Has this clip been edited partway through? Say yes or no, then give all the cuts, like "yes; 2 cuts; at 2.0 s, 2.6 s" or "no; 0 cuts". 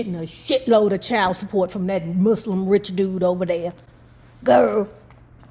no; 0 cuts